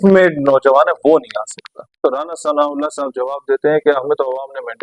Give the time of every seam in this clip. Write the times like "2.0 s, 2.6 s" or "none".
2.0 s

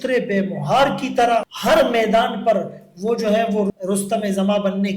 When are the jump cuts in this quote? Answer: 1.5 s, 3.7 s

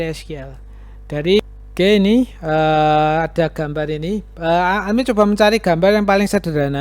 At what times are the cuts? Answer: 1.4 s

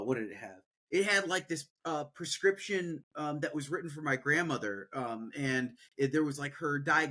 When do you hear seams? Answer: none

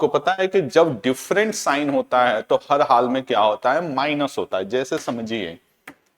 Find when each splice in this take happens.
none

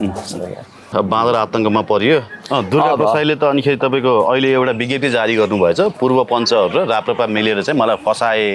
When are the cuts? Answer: 0.9 s, 2.4 s

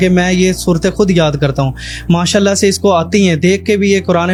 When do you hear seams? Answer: none

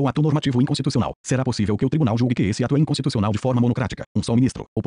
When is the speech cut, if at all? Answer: 1.2 s, 3.1 s

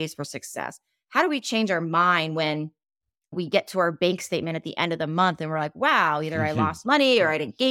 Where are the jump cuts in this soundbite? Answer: none

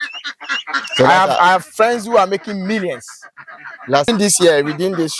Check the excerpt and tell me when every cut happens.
4.1 s

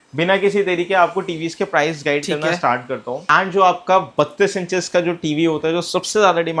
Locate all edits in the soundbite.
3.2 s

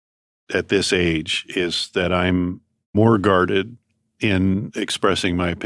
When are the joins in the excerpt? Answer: 3.0 s, 4.7 s

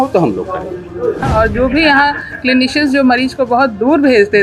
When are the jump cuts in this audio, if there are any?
1.1 s

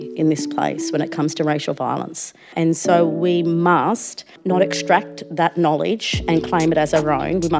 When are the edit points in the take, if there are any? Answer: 2.5 s, 4.4 s

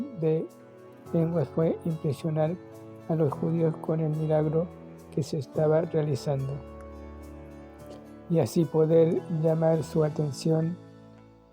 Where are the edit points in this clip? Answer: none

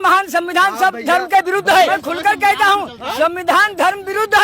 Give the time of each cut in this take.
1.9 s

